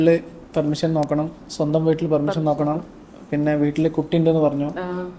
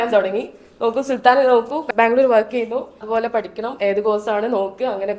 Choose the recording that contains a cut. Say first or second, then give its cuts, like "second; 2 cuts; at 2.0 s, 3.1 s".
second; 2 cuts; at 1.9 s, 3.0 s